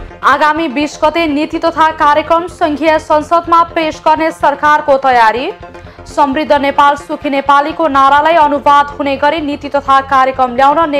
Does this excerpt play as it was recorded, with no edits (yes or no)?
yes